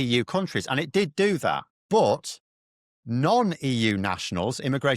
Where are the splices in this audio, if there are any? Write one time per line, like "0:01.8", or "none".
0:01.7

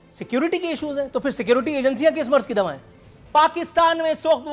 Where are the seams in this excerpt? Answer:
0:03.2

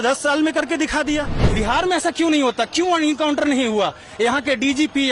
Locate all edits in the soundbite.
0:01.4

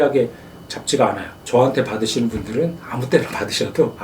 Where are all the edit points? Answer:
0:01.3

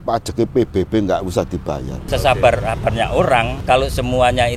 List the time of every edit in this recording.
0:02.0
0:03.5

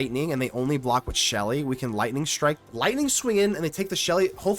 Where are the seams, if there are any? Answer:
0:02.6

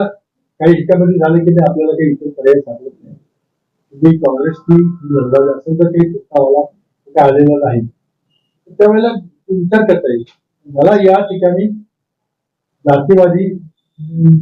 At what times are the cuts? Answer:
none

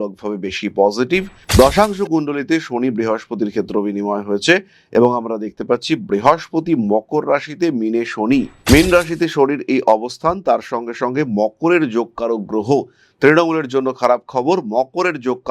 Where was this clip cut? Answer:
0:01.4

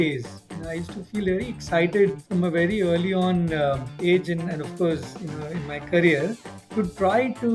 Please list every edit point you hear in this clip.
0:02.2
0:03.9

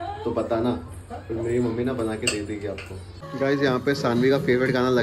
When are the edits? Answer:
0:03.2

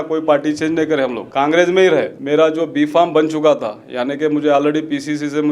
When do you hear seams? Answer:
0:01.2
0:02.2

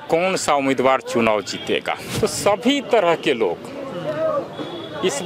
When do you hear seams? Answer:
0:02.1

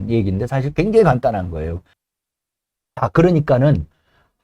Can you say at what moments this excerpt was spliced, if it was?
0:01.9

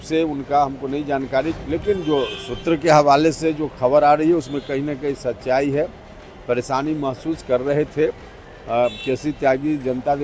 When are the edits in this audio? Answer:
0:01.6

